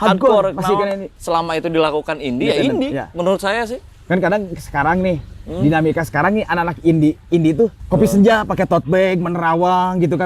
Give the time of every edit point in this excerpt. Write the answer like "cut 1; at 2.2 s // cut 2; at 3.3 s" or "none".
cut 1; at 1.1 s // cut 2; at 7.8 s